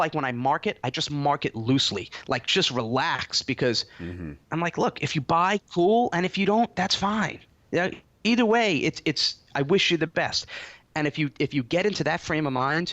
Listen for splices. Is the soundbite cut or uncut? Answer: cut